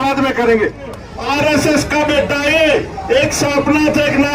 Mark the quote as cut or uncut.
cut